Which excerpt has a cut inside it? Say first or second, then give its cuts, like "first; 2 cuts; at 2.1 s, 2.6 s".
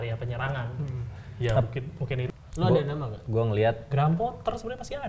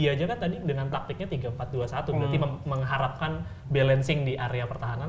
first; 1 cut; at 2.3 s